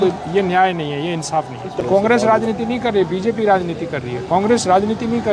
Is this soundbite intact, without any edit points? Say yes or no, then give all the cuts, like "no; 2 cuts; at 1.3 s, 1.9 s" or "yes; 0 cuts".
no; 1 cut; at 1.8 s